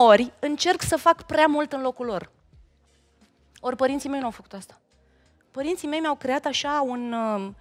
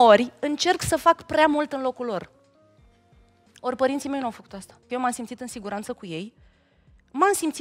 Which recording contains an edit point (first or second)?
second